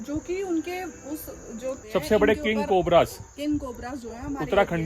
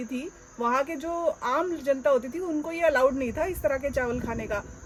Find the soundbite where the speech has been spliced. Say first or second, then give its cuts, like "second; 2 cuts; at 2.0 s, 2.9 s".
first; 1 cut; at 1.8 s